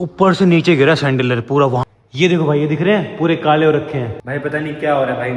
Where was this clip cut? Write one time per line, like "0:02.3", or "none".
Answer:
0:01.8
0:04.2